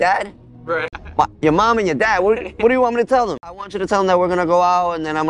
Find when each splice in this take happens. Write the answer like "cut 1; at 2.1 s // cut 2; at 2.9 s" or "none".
cut 1; at 0.9 s // cut 2; at 3.6 s